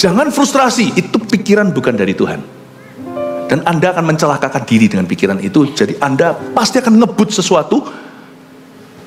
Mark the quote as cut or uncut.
cut